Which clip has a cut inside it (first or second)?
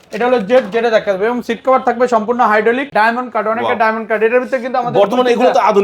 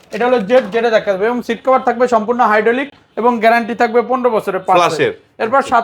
first